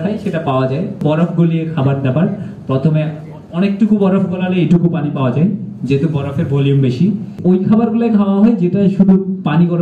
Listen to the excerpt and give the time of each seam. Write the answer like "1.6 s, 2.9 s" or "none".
1.0 s, 7.3 s